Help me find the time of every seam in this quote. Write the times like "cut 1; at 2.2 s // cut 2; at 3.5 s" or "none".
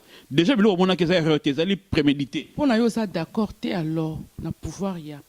none